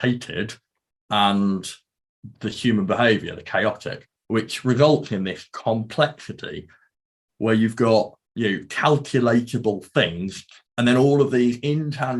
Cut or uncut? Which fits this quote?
cut